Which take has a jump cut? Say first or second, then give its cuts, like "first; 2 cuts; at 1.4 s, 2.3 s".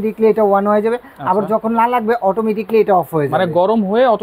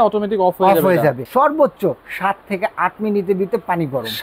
second; 1 cut; at 1.2 s